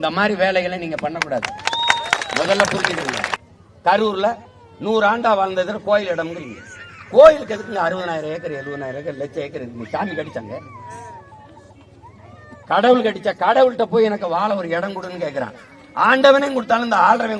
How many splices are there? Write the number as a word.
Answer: one